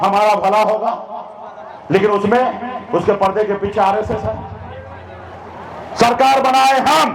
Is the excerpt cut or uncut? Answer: uncut